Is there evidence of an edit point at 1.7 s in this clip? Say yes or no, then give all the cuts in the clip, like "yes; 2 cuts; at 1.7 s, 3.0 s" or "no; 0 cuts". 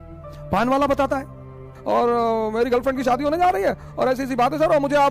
yes; 1 cut; at 1.7 s